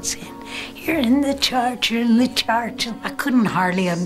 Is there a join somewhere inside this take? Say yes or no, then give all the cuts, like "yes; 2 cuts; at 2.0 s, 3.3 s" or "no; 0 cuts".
yes; 1 cut; at 3.1 s